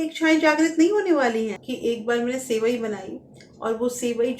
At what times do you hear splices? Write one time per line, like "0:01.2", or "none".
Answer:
0:01.6